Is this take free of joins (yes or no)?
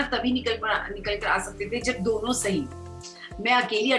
yes